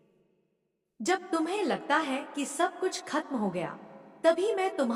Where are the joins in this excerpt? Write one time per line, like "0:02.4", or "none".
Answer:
none